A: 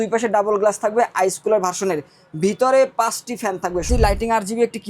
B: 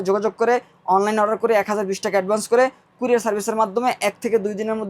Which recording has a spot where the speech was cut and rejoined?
A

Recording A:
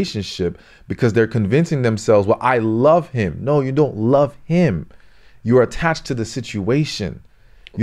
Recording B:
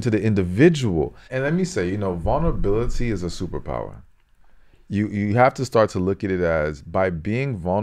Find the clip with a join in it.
B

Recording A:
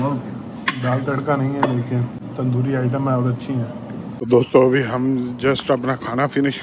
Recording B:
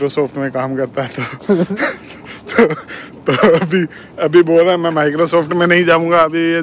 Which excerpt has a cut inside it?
A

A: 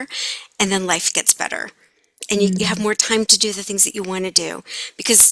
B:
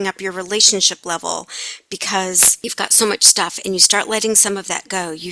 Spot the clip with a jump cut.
B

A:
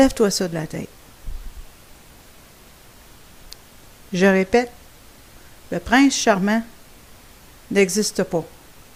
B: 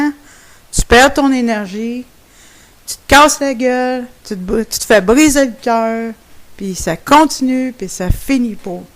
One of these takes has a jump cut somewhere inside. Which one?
B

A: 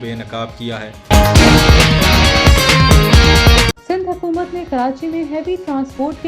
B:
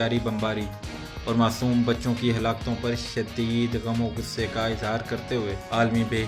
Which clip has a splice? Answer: A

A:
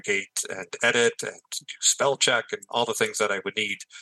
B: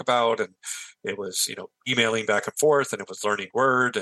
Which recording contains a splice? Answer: B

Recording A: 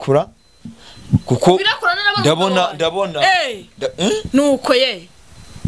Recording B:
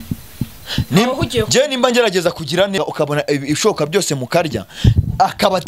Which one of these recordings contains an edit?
B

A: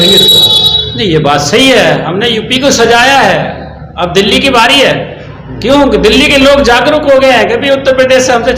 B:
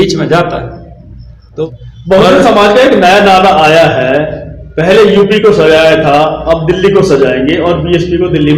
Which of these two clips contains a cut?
B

